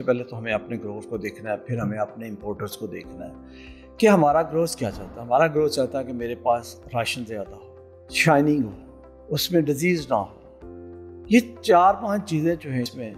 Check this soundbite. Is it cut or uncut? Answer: uncut